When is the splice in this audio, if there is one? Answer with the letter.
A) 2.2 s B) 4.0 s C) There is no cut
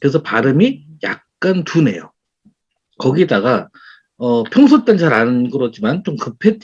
C